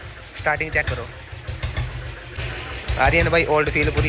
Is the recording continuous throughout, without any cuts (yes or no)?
no